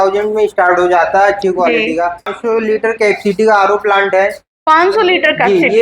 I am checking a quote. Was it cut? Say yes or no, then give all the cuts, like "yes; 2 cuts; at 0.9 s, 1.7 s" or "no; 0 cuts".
yes; 1 cut; at 2.3 s